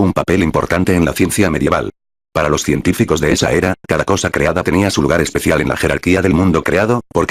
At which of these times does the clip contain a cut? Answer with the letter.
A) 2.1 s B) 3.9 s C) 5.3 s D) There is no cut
D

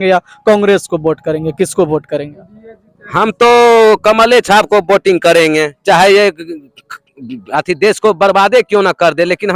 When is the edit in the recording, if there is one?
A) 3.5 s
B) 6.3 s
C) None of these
C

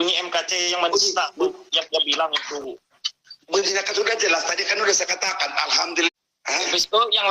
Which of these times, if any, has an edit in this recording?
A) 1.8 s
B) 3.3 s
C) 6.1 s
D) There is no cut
C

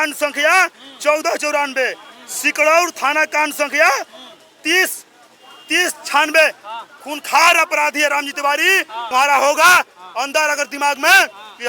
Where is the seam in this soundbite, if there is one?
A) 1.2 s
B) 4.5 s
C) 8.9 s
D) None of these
C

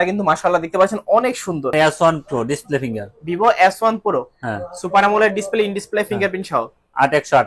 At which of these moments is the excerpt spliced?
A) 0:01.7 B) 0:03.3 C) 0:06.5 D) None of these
A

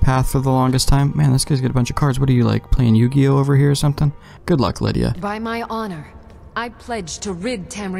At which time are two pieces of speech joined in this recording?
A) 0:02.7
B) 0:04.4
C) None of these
B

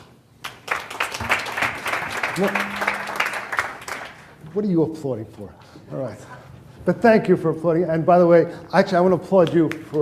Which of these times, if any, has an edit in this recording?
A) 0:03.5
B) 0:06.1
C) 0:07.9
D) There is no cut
C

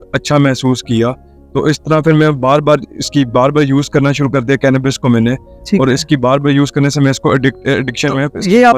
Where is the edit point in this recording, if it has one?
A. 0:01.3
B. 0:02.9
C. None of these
C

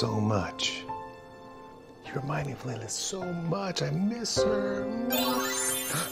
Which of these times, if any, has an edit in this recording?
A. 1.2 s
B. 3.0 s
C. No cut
A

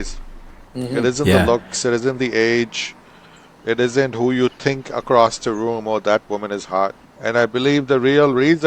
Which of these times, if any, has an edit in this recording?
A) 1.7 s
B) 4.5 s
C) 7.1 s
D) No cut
C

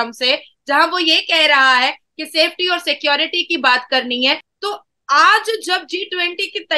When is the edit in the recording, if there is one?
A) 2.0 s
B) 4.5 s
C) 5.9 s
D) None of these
B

